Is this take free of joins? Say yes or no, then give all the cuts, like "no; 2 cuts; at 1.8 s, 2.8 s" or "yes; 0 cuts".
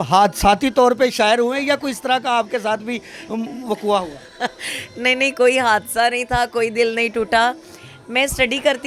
yes; 0 cuts